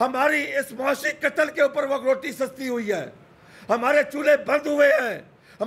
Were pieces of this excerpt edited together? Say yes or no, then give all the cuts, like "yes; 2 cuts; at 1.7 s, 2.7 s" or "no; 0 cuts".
no; 0 cuts